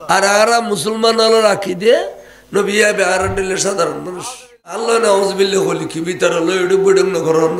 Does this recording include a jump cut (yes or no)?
yes